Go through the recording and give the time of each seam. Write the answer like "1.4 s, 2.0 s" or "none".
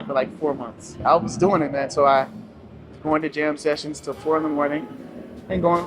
1.0 s